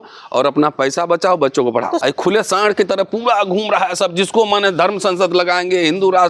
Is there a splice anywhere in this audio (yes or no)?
yes